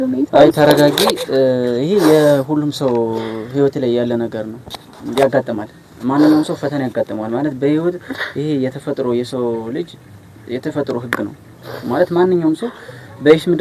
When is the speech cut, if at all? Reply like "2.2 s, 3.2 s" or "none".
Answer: none